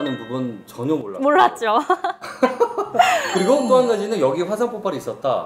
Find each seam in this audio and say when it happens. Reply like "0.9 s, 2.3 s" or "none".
none